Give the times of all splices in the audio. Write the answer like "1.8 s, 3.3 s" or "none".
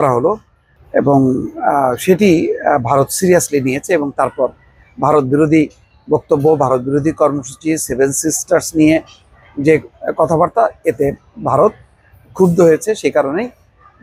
none